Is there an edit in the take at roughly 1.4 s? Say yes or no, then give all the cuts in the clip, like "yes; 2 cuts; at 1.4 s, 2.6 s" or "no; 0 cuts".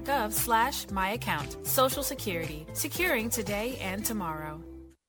yes; 1 cut; at 1.4 s